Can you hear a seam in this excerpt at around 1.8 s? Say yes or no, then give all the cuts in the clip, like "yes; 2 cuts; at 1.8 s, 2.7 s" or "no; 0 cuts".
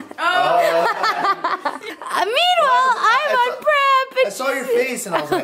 yes; 1 cut; at 1.8 s